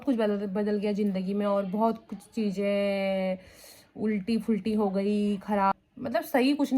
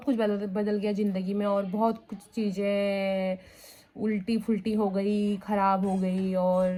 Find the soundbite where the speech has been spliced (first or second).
first